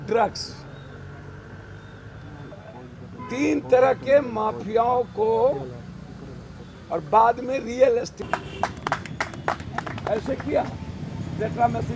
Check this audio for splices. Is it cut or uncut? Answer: uncut